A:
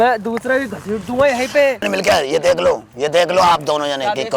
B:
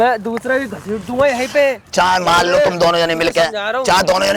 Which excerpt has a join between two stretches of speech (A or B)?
A